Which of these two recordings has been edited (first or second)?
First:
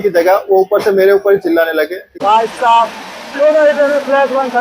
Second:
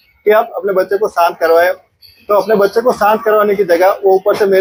first